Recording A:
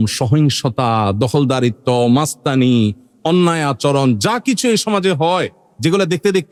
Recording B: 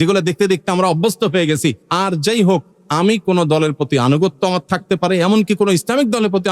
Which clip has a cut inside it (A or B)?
B